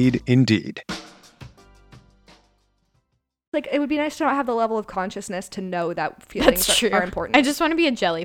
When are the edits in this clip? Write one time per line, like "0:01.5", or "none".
0:03.5